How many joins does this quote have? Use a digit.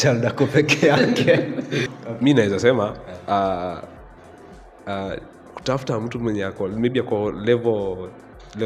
1